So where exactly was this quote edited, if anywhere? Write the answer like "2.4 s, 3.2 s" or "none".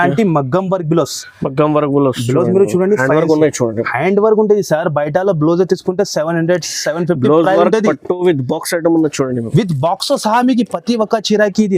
none

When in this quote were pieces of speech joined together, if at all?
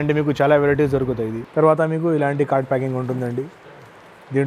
1.4 s

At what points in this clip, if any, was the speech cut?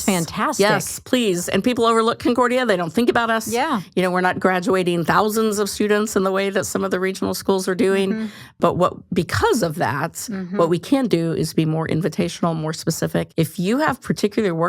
8.5 s, 13.3 s

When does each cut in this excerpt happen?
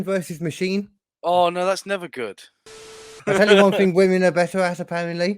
1.0 s, 2.7 s

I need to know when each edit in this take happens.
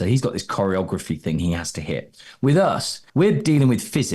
2.9 s

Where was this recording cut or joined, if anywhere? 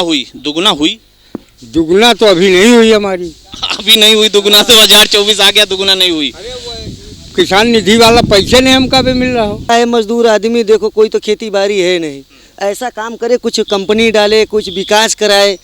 9.7 s

